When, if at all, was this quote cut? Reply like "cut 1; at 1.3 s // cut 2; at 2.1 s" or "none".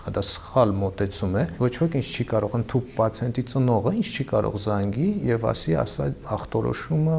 cut 1; at 1.5 s